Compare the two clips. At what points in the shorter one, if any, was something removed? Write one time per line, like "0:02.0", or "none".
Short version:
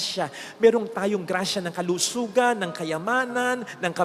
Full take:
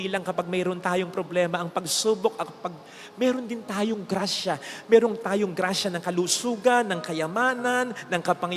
none

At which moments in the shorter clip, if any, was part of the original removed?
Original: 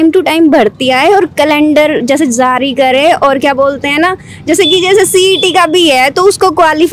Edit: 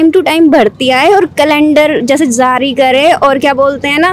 none

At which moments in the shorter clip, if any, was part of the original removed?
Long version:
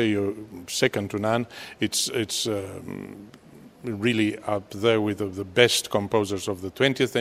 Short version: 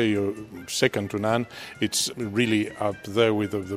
0:02.0

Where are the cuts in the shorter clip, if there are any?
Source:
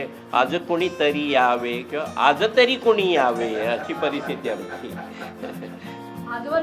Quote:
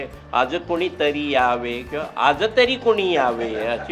none

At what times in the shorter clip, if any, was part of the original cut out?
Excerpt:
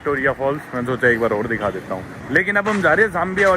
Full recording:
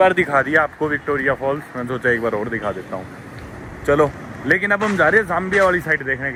0:02.1

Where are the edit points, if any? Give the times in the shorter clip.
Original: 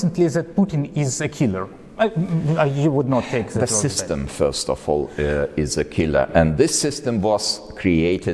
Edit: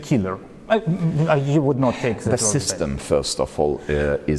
none

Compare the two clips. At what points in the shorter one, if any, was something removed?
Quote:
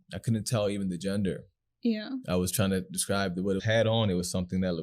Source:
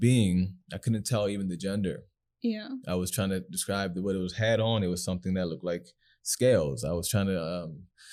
0:03.6

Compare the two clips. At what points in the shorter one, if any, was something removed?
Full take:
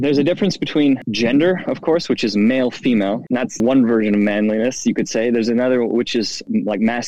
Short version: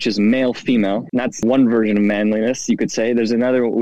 none

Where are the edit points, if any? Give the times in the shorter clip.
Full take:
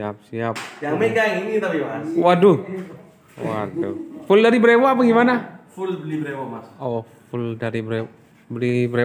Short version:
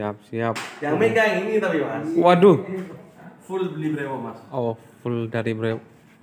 0:03.3

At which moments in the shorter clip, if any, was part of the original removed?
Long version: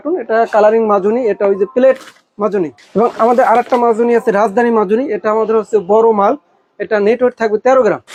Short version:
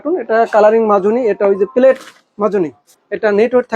0:02.8

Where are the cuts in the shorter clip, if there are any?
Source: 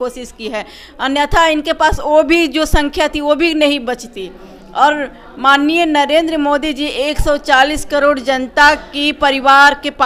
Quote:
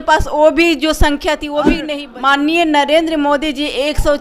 0:01.8

